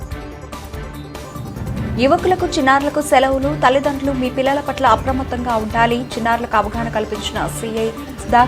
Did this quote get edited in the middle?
yes; 1 cut; at 1.2 s

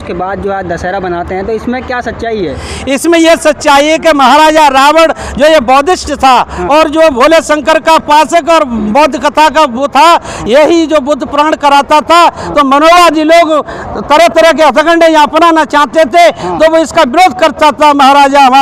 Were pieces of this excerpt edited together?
no; 0 cuts

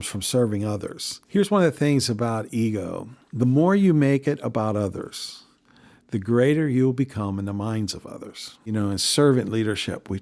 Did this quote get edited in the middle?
yes; 1 cut; at 8.7 s

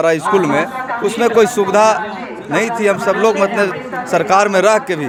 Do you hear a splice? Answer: no; 0 cuts

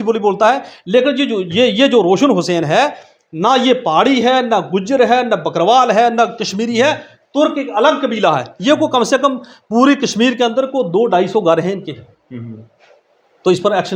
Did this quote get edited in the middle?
no; 0 cuts

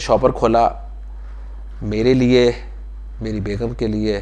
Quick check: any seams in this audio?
no; 0 cuts

